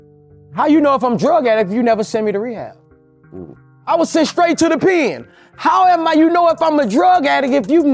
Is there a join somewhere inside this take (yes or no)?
no